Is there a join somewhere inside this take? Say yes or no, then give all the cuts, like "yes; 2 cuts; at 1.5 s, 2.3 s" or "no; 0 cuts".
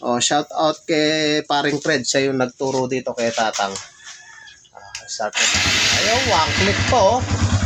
no; 0 cuts